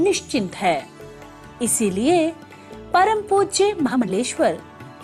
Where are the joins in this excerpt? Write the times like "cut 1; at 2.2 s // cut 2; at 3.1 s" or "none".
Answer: cut 1; at 0.7 s // cut 2; at 4.0 s